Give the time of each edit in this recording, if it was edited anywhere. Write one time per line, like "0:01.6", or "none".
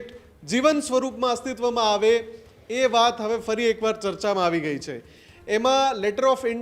none